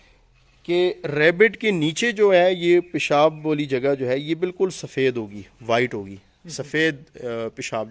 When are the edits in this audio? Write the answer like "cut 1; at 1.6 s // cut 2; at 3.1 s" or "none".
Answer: none